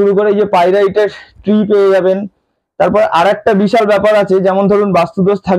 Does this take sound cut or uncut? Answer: uncut